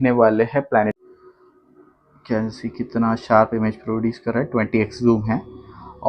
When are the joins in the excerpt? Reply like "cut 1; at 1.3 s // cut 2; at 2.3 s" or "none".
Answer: cut 1; at 0.9 s